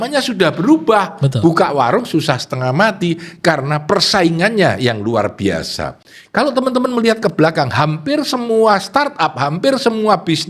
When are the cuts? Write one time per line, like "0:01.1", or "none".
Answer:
none